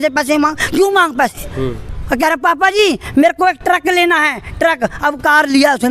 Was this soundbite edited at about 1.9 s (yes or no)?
yes